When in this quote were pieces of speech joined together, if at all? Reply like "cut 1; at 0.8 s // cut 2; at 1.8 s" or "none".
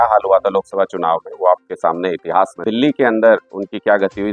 cut 1; at 2.6 s

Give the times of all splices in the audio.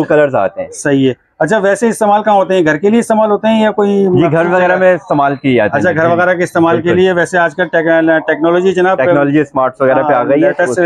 none

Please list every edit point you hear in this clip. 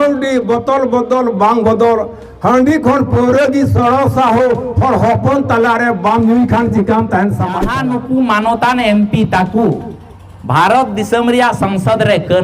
cut 1; at 7.7 s

